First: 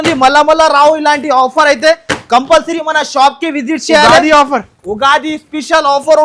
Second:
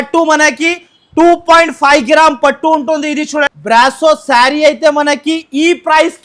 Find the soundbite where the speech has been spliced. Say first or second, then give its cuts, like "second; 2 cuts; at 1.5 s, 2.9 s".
second; 1 cut; at 3.5 s